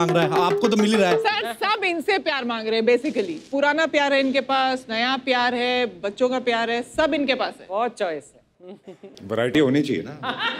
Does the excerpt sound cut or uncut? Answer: uncut